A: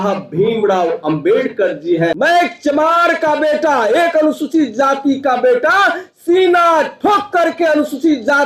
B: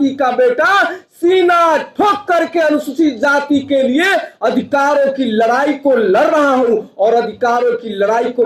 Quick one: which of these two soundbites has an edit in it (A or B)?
A